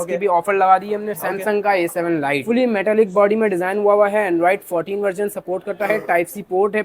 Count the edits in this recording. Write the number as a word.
one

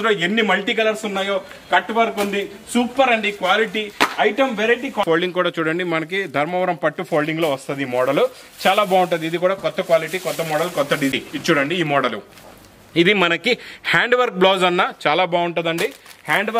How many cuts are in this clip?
two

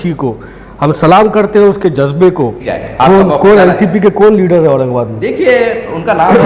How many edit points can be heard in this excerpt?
one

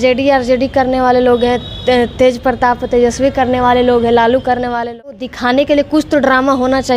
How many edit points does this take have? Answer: one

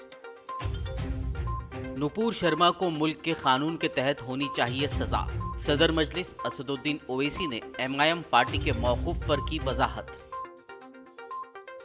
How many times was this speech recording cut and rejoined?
one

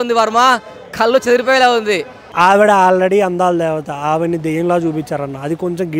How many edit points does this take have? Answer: one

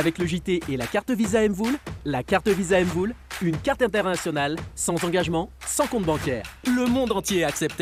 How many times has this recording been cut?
zero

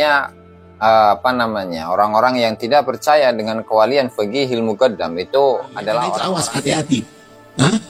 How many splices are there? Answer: one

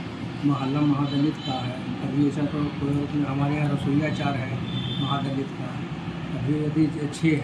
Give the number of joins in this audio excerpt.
zero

